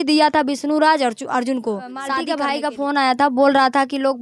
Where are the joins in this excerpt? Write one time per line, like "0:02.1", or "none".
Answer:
0:02.2